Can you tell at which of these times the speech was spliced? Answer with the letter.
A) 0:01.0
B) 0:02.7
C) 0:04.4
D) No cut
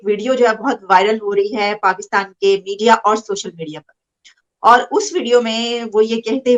D